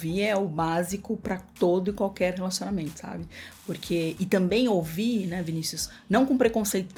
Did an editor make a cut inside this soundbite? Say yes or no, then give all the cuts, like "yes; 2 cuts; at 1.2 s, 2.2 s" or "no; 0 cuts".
no; 0 cuts